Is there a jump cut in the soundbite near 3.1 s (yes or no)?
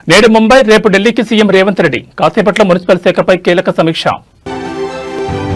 no